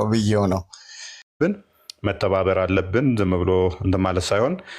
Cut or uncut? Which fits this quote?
cut